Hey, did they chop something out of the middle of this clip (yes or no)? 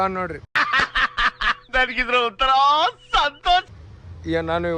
no